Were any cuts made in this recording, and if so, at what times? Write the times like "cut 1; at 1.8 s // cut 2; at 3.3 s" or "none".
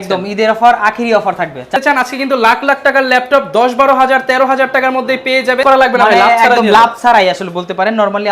cut 1; at 1.8 s // cut 2; at 5.6 s